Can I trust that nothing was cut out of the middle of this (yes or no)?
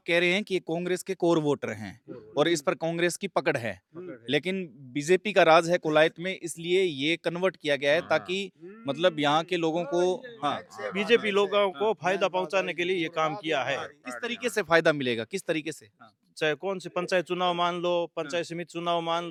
yes